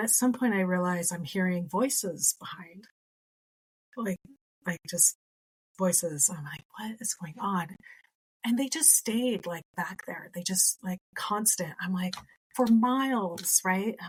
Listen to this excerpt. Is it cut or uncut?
uncut